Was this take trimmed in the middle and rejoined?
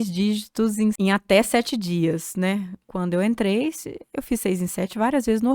yes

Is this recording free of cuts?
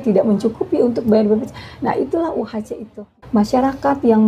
no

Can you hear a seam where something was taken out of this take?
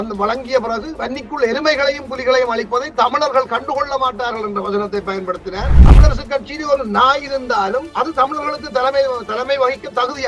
yes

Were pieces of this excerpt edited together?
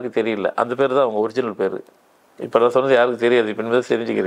no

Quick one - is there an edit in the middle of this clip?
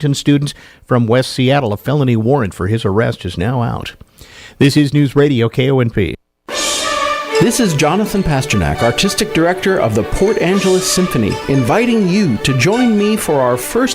yes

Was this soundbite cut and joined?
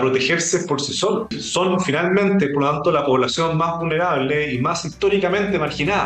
yes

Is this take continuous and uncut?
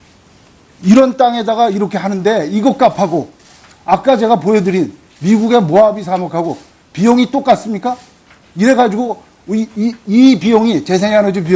no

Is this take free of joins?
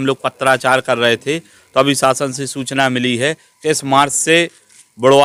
yes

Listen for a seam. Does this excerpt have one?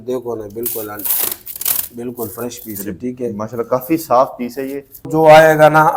yes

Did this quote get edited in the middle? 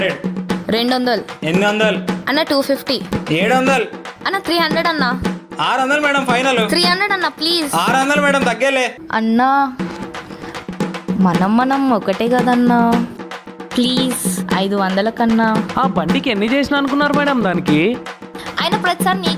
yes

